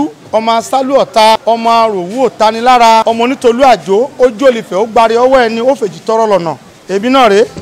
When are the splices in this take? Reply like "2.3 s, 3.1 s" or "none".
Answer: 1.4 s, 3.0 s, 6.7 s